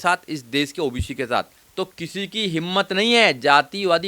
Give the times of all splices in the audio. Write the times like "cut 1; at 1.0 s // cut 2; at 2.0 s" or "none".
cut 1; at 1.6 s